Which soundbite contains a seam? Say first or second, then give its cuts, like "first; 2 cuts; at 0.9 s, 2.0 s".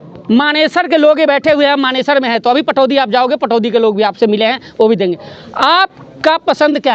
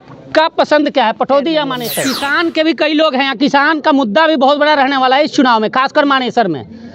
second; 1 cut; at 2.0 s